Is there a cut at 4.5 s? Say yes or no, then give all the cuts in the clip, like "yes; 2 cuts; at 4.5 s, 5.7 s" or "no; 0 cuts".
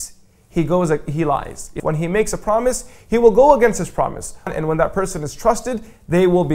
yes; 2 cuts; at 1.7 s, 4.5 s